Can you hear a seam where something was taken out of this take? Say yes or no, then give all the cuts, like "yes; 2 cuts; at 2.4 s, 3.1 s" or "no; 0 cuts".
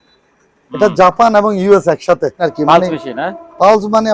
yes; 1 cut; at 2.5 s